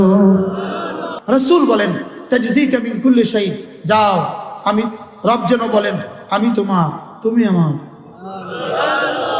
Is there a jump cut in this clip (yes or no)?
yes